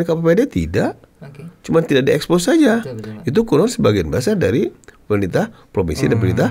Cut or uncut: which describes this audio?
uncut